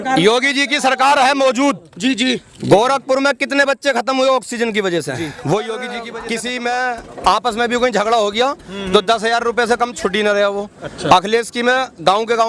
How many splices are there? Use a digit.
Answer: 1